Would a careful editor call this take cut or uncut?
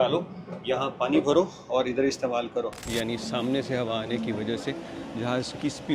cut